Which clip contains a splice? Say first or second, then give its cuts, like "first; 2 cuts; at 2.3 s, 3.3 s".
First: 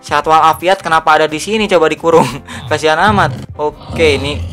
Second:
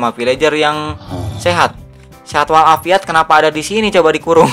first; 1 cut; at 3.4 s